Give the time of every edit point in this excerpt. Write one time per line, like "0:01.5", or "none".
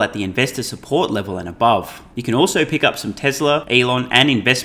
0:02.1
0:03.6

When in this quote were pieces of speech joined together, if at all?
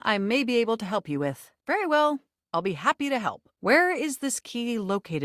0:01.5
0:03.5

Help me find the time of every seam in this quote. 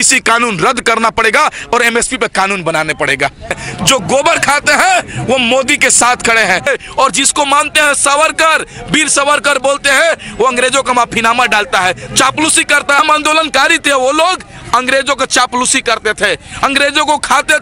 0:03.6
0:06.7
0:13.0

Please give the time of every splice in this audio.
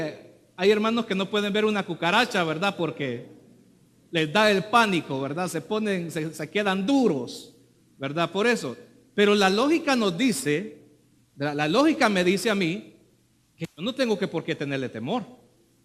0:10.0

